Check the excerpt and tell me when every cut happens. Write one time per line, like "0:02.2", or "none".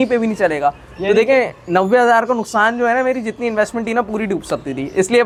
none